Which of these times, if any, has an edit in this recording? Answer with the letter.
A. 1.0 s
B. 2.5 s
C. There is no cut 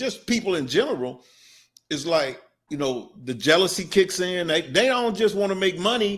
B